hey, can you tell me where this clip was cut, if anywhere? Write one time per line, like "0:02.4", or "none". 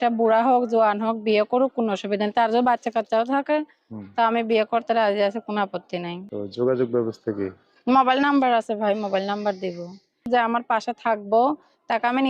0:06.2
0:10.2